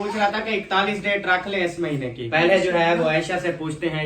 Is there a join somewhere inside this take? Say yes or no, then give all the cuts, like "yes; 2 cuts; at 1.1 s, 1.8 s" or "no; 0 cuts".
yes; 1 cut; at 2.3 s